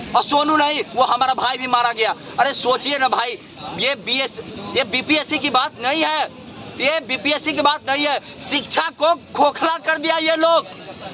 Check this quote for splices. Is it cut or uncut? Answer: uncut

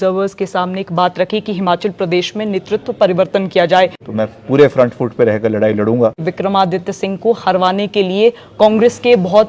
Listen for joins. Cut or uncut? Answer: cut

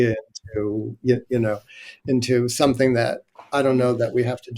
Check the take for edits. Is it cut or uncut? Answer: uncut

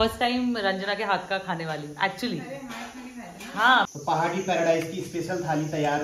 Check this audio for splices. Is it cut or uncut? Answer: cut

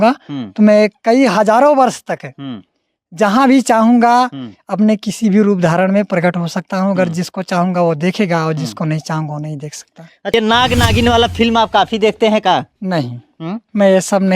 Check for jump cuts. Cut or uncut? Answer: cut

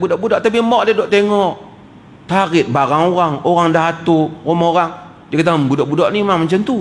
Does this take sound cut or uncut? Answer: uncut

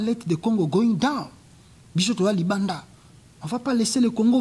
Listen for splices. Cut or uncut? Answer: uncut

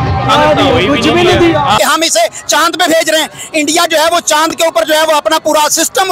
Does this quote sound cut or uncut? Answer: cut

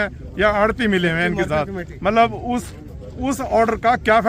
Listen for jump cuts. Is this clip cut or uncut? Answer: uncut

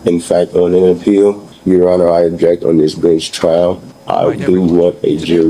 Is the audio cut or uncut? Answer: cut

